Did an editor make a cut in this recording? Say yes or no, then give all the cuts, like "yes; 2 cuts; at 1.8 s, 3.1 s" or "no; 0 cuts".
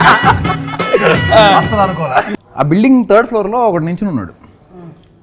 yes; 1 cut; at 2.3 s